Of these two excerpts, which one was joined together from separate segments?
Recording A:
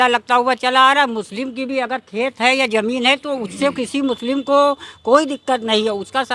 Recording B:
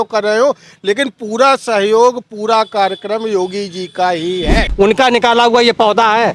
B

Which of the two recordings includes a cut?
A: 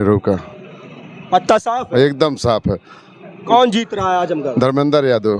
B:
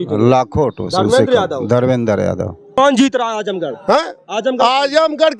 B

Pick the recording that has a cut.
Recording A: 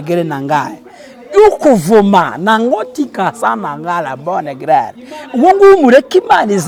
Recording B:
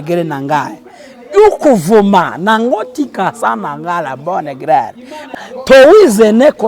B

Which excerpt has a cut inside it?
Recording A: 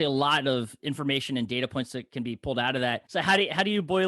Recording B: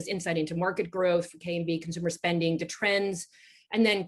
A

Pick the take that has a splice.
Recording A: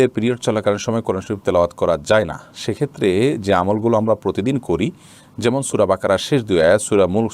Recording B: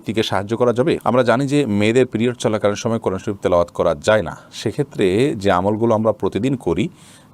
B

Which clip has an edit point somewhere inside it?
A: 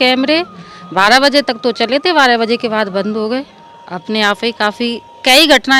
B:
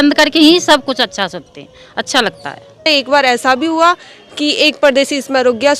B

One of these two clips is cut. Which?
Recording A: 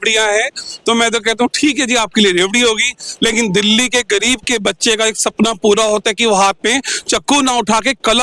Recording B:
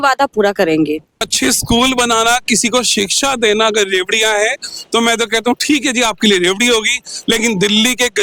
B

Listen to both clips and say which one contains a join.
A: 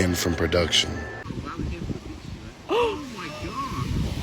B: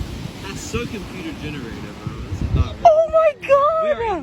A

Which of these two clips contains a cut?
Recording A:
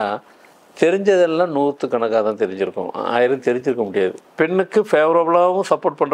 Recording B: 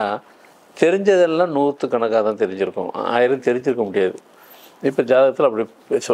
A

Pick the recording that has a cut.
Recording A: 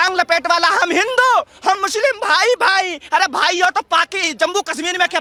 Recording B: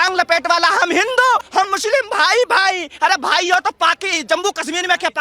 B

